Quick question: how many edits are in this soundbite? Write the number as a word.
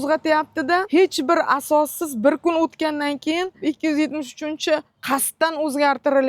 two